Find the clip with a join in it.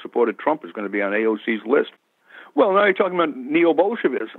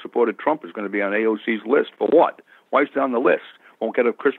first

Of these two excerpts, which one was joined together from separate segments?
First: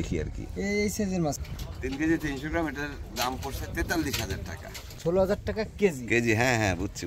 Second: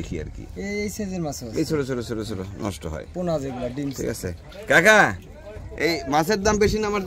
first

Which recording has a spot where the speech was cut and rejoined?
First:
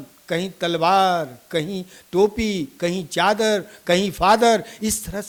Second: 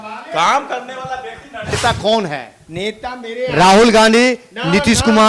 second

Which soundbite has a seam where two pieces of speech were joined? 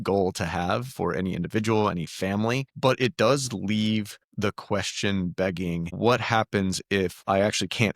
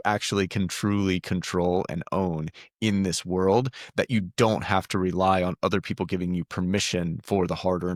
first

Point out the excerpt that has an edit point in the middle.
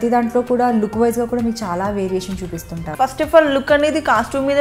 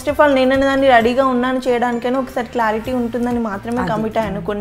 first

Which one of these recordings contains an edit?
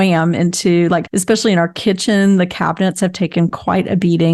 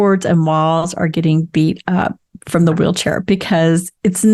first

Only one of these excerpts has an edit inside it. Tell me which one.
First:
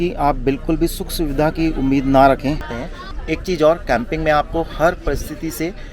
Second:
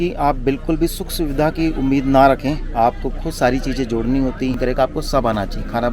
first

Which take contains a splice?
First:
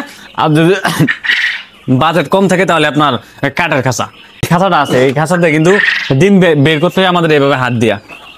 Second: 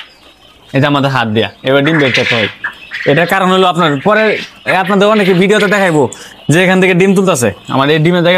first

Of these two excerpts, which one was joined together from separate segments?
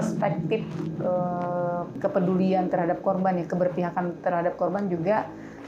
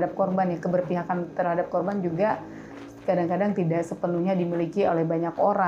first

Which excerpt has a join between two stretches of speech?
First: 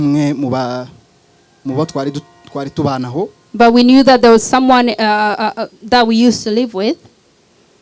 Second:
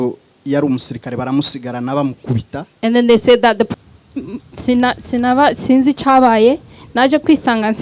second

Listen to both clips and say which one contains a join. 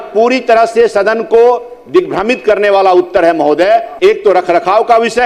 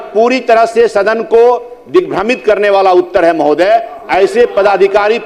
first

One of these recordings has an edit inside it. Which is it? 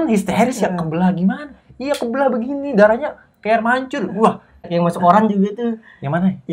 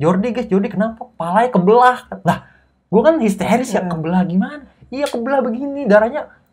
first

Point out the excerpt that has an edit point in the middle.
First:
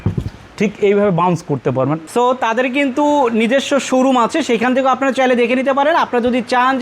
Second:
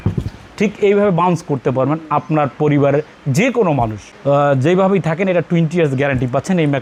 first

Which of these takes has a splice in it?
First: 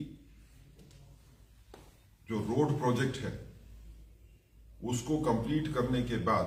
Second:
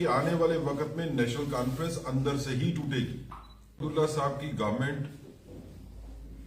second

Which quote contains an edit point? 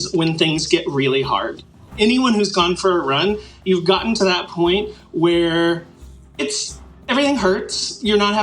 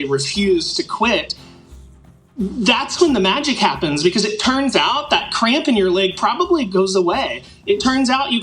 first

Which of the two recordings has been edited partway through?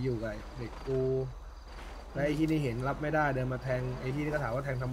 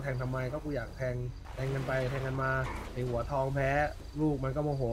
second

